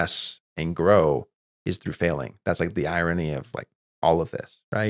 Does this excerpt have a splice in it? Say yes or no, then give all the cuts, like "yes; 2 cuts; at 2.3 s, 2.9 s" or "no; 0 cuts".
no; 0 cuts